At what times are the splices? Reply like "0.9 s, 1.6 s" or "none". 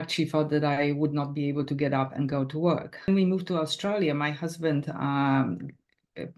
3.1 s